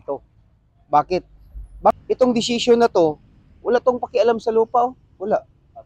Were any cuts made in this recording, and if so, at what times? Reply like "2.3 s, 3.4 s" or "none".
2.0 s